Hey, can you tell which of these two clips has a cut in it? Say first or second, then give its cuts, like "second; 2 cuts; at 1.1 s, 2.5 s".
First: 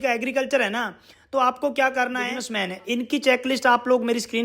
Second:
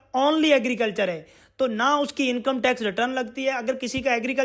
first; 1 cut; at 2.5 s